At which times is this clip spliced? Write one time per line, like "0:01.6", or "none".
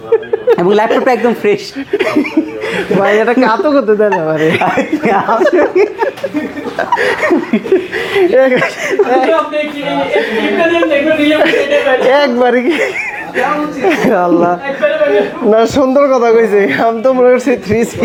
none